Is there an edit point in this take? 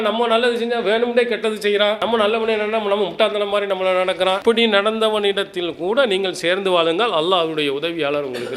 no; 0 cuts

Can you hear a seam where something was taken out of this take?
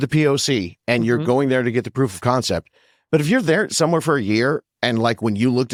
no; 0 cuts

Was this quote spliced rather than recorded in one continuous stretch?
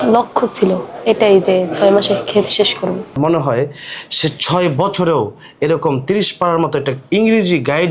yes; 1 cut; at 3.2 s

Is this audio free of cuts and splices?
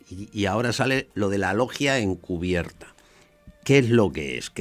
no; 1 cut; at 3.0 s

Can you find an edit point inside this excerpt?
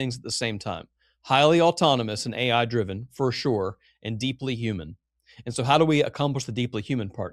no; 0 cuts

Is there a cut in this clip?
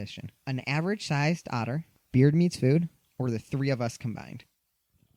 no; 0 cuts

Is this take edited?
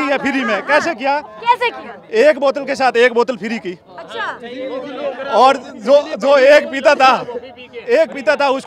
no; 0 cuts

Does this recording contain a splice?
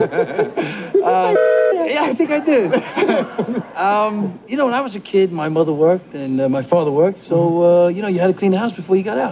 no; 0 cuts

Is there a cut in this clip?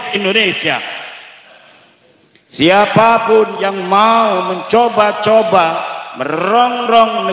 yes; 1 cut; at 1.3 s

